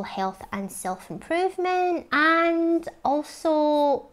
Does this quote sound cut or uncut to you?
cut